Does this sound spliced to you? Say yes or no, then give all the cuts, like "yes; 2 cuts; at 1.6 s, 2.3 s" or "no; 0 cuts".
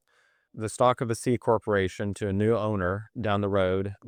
no; 0 cuts